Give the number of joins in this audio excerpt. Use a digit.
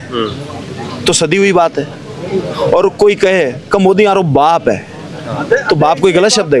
0